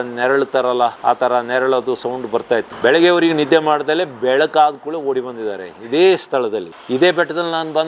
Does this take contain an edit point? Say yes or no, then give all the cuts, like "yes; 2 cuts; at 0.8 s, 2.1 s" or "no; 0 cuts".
yes; 2 cuts; at 2.7 s, 6.8 s